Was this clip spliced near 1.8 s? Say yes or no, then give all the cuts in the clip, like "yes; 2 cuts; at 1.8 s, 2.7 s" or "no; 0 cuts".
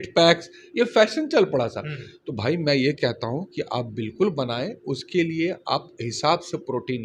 no; 0 cuts